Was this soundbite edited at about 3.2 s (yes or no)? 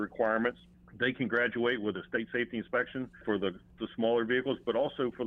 yes